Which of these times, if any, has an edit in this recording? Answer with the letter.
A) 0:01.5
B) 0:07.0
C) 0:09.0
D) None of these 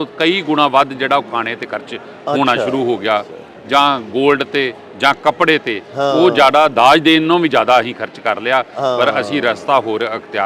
D